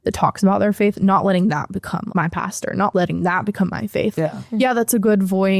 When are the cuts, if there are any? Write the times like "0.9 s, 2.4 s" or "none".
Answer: 2.1 s, 2.9 s, 4.1 s